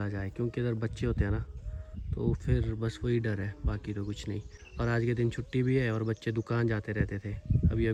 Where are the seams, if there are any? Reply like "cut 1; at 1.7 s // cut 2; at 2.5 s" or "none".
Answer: none